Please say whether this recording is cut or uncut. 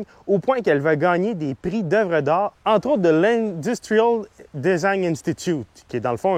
uncut